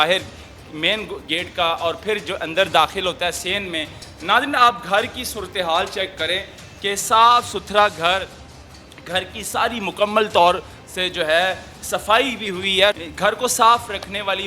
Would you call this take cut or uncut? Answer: uncut